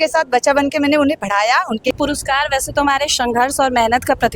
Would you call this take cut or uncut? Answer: cut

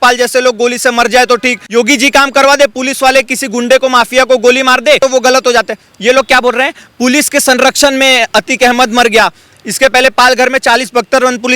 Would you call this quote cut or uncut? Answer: cut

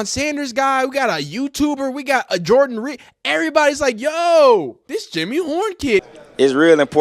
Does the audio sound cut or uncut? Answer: cut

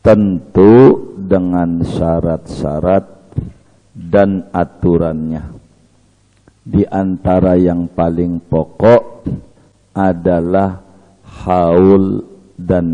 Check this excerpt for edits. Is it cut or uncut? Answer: uncut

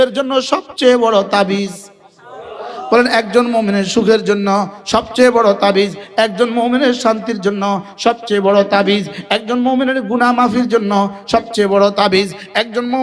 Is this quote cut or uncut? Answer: uncut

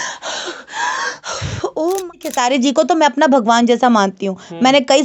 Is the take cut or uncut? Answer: cut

